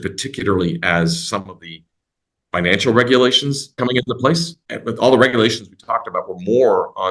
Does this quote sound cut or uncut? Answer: cut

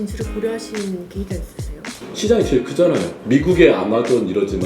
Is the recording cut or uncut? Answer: cut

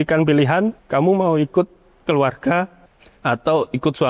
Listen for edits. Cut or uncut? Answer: uncut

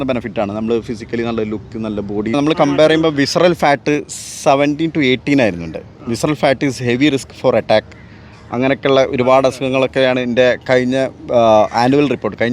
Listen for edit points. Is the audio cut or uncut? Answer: cut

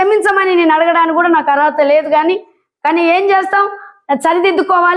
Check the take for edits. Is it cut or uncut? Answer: uncut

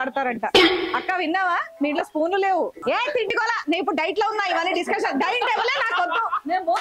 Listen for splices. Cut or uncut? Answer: cut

